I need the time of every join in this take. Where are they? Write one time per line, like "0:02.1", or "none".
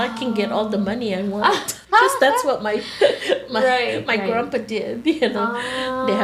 0:01.7